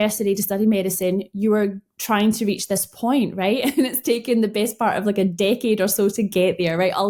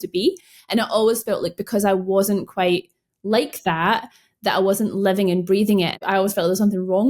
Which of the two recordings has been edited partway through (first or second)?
second